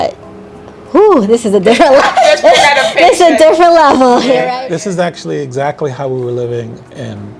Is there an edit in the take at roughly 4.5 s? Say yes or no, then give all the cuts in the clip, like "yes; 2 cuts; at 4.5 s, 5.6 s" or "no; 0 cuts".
yes; 1 cut; at 4.5 s